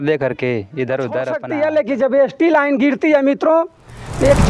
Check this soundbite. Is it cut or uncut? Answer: cut